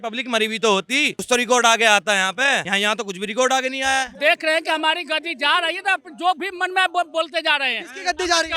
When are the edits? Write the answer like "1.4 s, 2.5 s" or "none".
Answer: 1.2 s, 2.7 s, 4.1 s

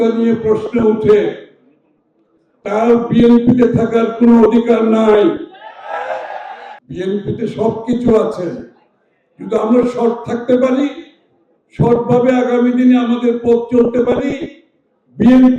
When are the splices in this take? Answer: 6.7 s

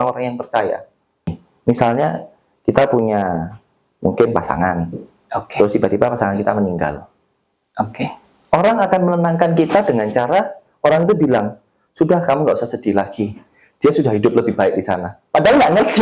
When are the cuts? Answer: 1.4 s

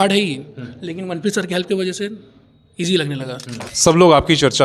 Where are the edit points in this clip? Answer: 3.7 s

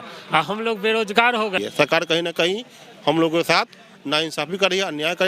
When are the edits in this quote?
1.6 s

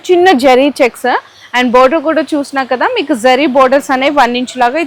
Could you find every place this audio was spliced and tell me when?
none

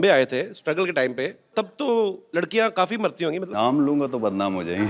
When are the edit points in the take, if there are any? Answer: 1.5 s, 2.2 s, 3.5 s

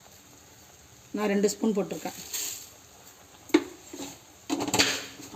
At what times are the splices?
none

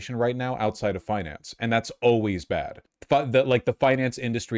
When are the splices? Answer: none

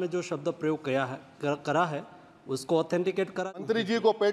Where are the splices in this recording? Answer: 3.4 s

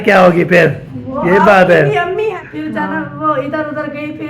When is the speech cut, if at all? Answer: 2.4 s

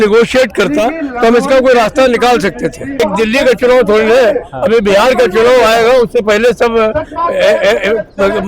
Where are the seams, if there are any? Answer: 3.0 s

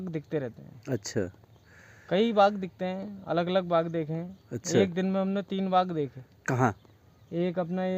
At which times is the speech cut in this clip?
none

